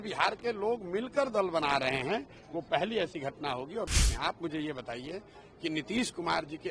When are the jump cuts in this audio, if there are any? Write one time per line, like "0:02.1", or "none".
0:03.9

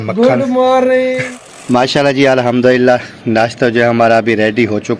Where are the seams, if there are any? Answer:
0:01.2

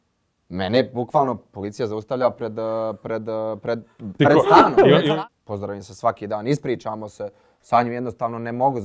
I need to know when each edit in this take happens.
0:05.0

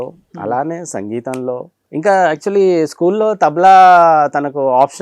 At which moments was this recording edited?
0:01.8

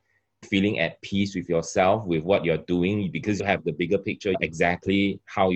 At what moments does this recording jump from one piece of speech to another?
0:03.4
0:04.4

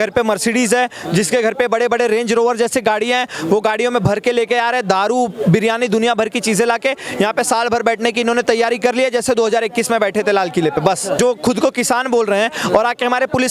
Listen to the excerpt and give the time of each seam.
0:11.2

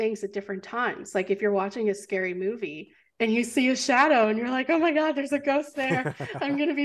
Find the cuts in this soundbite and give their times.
none

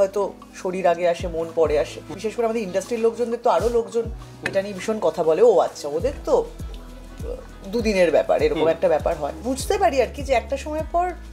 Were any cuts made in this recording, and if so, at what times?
0:02.1
0:09.4

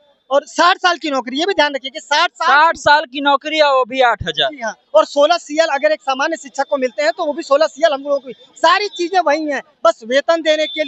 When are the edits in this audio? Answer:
none

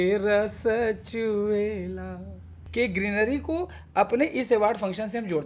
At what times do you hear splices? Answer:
0:02.6

